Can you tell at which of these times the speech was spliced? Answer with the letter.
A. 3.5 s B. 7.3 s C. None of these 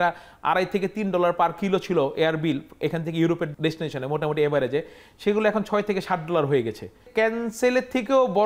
A